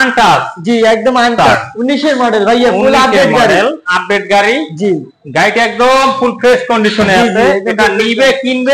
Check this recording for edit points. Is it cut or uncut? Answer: cut